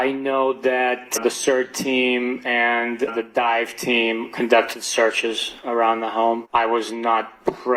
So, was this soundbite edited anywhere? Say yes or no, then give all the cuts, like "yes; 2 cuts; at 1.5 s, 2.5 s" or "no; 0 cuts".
no; 0 cuts